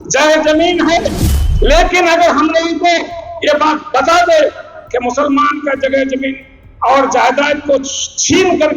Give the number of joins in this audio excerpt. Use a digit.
1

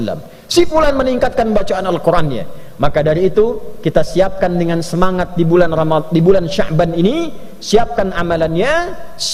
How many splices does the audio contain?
0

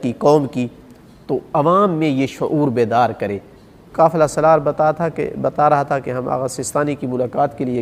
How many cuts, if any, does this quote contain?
1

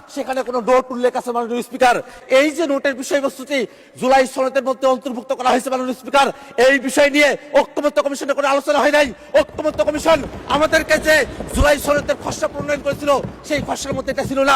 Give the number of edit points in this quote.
1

